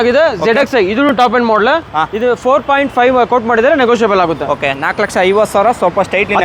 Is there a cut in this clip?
no; 0 cuts

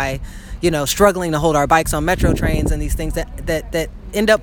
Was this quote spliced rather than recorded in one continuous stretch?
no; 0 cuts

